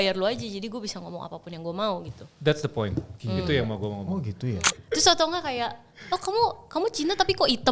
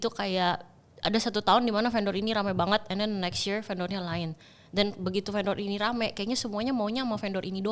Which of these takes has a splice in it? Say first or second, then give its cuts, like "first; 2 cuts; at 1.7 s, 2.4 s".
first; 1 cut; at 4.8 s